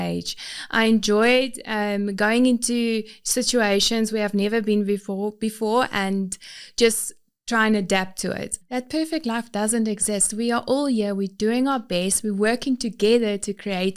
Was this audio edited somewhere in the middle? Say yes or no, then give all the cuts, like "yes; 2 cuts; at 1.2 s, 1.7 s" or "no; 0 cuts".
yes; 1 cut; at 8.5 s